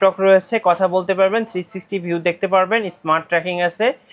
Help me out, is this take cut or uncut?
uncut